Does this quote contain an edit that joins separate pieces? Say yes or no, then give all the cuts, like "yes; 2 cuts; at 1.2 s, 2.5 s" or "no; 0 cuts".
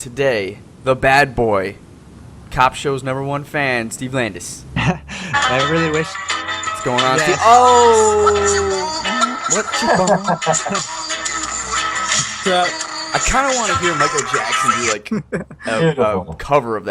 yes; 1 cut; at 3.9 s